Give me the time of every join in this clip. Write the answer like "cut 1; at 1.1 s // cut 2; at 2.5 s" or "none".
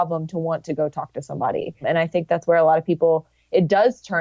cut 1; at 1.8 s